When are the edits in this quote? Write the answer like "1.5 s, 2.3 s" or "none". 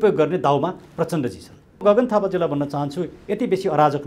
1.8 s